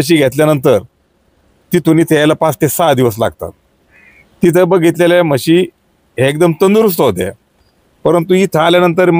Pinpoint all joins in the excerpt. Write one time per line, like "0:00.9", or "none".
none